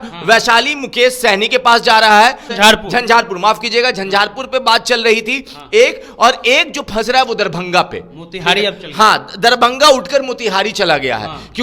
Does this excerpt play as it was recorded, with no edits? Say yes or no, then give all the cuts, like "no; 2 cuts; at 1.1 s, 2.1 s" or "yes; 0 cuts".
no; 1 cut; at 2.5 s